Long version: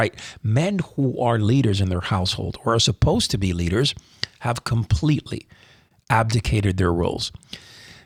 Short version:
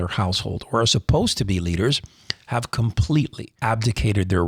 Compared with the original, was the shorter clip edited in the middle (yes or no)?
yes